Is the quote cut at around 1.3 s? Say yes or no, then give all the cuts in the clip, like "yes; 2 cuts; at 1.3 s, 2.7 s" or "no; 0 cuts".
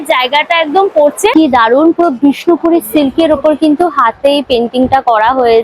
yes; 1 cut; at 1.3 s